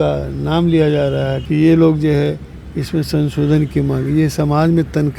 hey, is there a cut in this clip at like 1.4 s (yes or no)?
yes